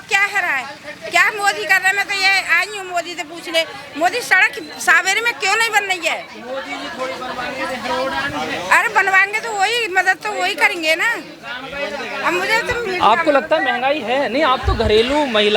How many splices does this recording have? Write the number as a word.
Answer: zero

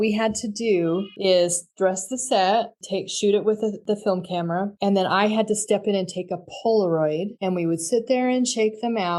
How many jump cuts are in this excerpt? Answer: zero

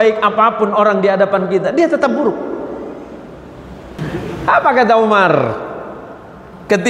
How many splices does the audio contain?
one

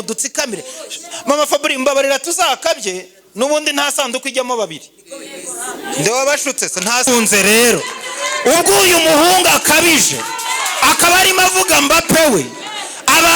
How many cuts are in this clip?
one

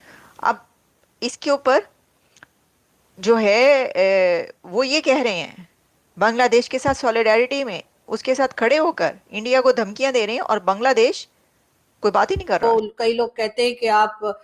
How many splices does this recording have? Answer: one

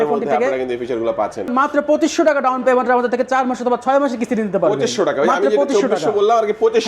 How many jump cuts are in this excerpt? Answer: one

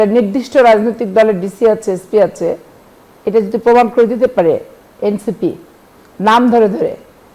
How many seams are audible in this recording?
zero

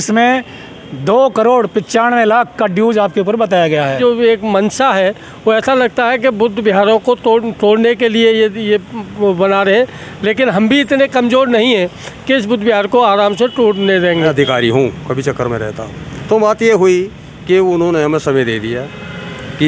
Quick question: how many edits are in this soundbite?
two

